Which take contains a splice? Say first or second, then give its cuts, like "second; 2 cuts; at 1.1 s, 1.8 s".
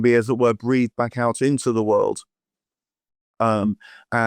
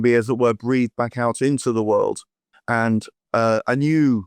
second; 1 cut; at 2.5 s